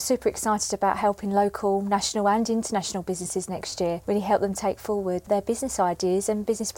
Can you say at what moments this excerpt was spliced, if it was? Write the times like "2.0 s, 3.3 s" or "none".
4.0 s, 5.3 s